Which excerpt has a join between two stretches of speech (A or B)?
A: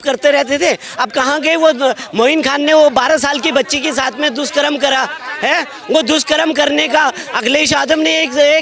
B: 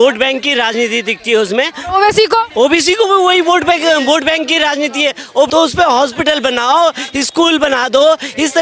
B